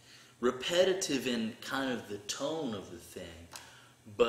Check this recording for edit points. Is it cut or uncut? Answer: cut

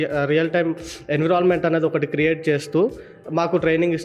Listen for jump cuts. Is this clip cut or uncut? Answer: uncut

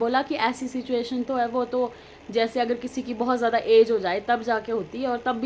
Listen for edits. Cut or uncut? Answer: uncut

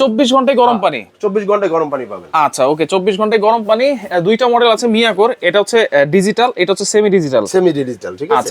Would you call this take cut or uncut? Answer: uncut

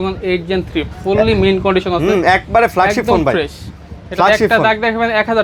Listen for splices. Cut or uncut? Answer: uncut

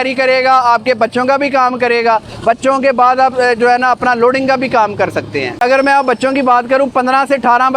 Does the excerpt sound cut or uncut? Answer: uncut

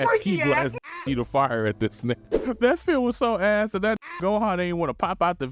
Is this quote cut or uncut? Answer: cut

